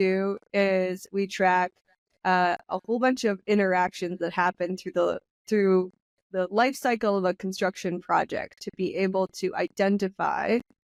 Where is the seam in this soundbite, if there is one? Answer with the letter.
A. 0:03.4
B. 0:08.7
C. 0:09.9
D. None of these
D